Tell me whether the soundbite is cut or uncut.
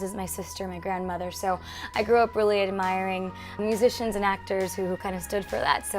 cut